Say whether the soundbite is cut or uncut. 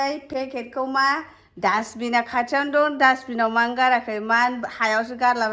uncut